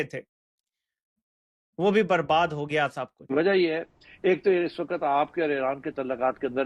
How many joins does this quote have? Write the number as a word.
one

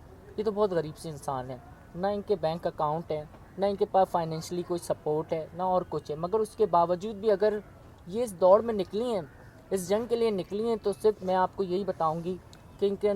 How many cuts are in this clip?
zero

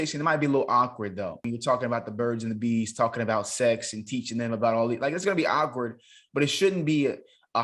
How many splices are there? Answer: one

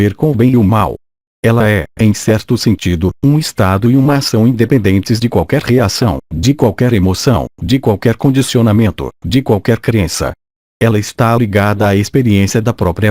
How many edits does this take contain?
one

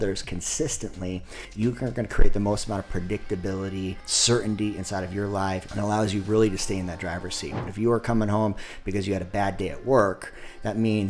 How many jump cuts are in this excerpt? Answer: three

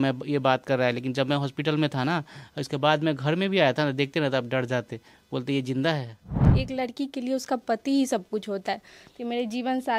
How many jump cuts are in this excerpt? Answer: one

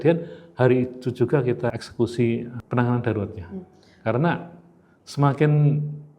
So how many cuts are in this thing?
two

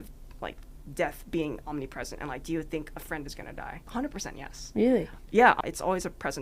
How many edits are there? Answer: two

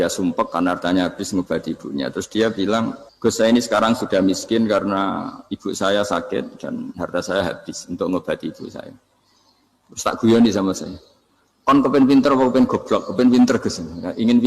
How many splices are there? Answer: one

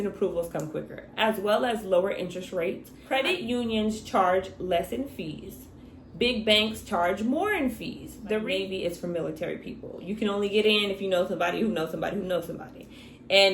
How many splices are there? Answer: two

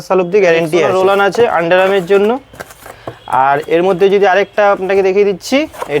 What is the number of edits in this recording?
one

